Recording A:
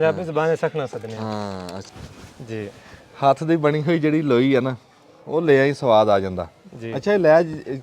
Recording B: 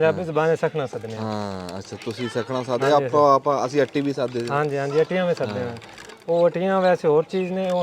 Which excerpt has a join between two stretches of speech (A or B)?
A